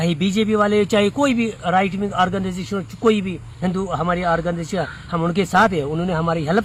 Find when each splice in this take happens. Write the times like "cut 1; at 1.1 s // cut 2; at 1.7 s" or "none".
none